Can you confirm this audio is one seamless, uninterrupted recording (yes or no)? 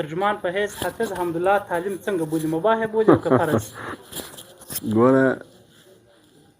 yes